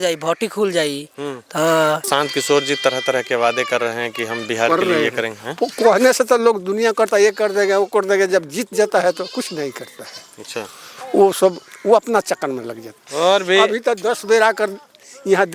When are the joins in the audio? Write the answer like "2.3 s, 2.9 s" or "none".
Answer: 2.0 s